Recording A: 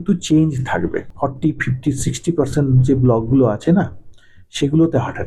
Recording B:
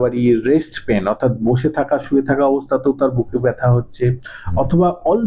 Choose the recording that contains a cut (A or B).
A